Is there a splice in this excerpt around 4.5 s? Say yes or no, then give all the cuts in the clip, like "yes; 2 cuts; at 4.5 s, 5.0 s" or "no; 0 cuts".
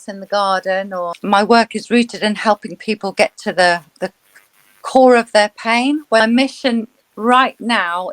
no; 2 cuts; at 0.9 s, 6.2 s